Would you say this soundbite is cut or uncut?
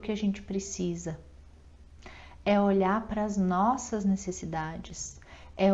uncut